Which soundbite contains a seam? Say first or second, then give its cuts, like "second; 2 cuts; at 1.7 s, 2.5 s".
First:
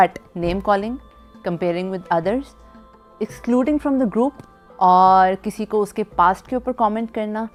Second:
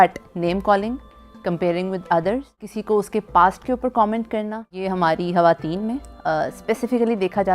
second; 2 cuts; at 2.7 s, 4.8 s